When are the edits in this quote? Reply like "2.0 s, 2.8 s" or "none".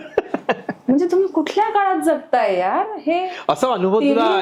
none